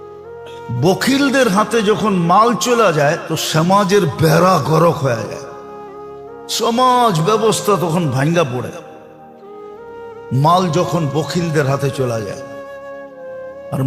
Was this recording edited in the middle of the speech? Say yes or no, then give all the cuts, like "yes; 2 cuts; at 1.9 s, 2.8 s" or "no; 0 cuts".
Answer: no; 0 cuts